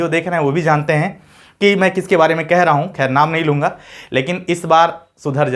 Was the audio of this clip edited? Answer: no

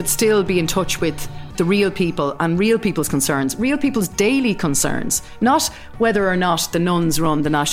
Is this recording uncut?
yes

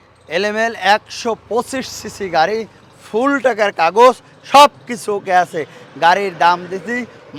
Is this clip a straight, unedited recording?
yes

